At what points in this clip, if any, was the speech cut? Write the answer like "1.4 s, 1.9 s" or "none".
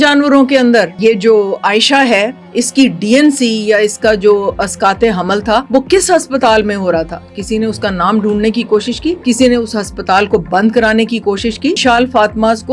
0.9 s, 5.7 s, 9.2 s, 11.8 s